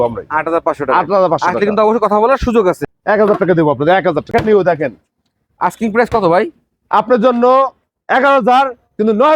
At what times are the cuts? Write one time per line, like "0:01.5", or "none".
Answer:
0:02.8
0:04.3

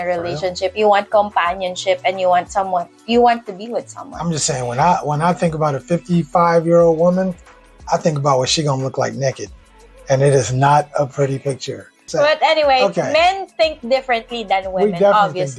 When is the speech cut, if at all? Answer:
0:12.1

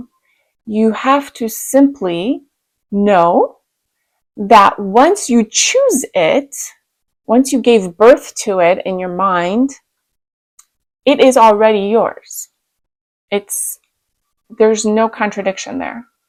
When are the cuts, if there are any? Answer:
none

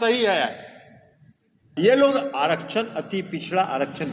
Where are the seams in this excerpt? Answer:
0:01.7

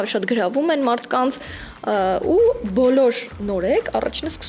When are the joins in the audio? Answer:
none

